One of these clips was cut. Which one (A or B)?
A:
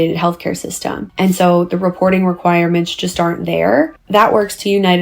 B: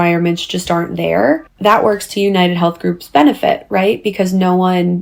A